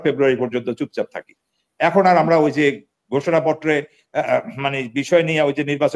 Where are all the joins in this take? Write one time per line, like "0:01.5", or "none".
none